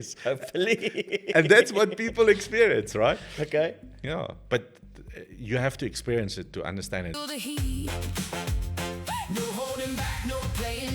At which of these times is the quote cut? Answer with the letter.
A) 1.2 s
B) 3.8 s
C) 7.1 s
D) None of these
C